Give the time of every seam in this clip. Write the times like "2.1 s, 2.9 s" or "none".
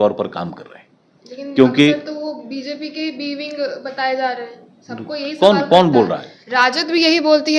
none